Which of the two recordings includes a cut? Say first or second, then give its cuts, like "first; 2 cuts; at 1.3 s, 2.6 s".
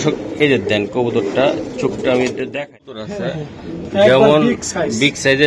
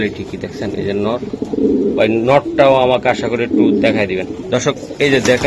first; 1 cut; at 2.9 s